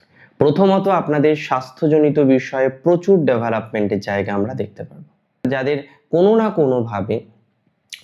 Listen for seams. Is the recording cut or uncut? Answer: cut